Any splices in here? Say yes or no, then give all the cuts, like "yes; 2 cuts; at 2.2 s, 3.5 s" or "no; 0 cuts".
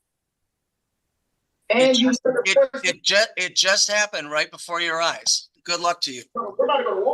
yes; 1 cut; at 5.5 s